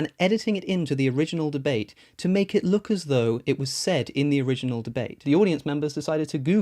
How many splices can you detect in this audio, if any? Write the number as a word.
one